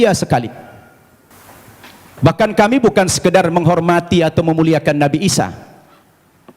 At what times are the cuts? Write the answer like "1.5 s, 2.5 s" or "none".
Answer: none